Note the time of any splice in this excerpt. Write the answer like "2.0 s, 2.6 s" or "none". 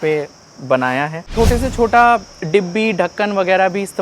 1.3 s